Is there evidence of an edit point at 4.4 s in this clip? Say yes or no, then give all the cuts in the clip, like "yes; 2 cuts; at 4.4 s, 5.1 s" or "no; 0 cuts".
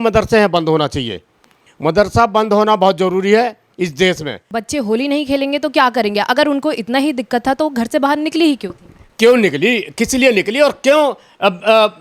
yes; 1 cut; at 4.4 s